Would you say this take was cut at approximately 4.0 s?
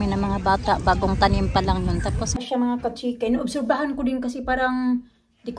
no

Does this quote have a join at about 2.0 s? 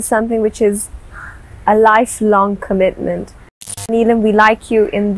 no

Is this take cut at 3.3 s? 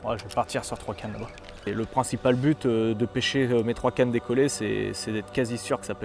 no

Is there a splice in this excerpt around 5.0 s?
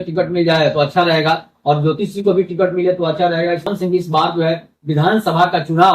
no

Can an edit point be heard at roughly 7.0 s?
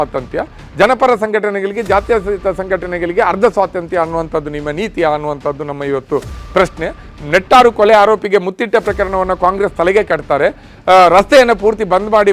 yes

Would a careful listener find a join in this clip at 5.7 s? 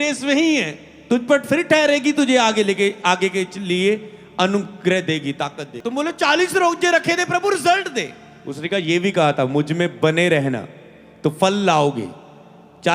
yes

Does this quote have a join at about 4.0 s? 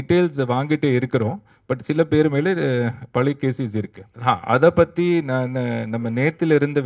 yes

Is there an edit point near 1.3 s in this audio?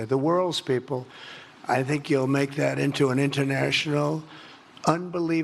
no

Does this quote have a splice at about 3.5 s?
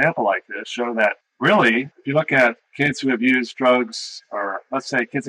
no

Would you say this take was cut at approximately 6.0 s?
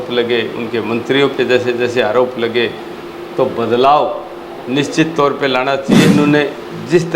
yes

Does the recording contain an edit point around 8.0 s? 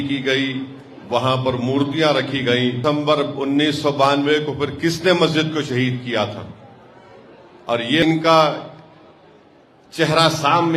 yes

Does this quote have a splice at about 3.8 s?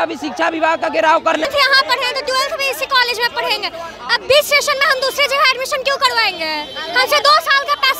no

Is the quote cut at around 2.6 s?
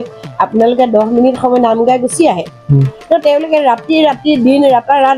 no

